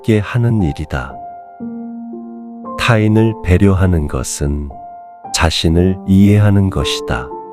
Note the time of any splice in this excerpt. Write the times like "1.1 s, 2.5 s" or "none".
1.1 s, 2.5 s